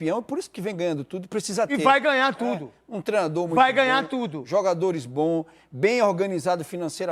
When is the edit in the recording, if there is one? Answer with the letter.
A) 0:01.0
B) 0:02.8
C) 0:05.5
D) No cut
D